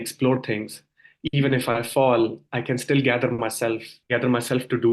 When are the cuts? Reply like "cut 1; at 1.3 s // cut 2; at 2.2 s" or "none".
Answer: cut 1; at 3.9 s